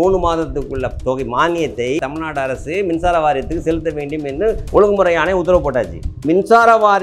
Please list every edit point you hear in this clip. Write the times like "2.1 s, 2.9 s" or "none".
2.0 s, 6.2 s